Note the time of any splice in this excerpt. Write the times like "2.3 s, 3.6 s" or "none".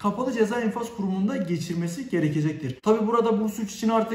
2.7 s